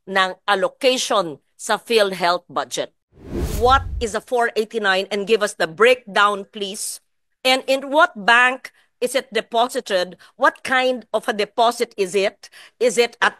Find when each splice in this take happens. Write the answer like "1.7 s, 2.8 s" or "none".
3.1 s